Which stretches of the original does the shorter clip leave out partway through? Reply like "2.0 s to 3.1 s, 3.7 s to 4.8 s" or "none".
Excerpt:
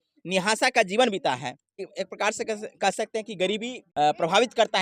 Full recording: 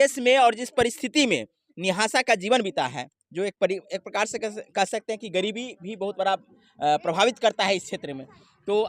3.3 s to 3.8 s, 5.7 s to 6.6 s